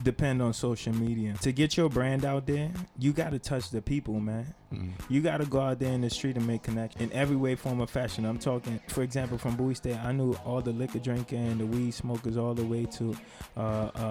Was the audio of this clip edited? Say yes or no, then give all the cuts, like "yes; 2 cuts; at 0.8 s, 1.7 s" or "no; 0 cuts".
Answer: yes; 3 cuts; at 1.4 s, 6.9 s, 8.8 s